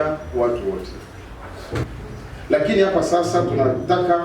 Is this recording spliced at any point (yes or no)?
yes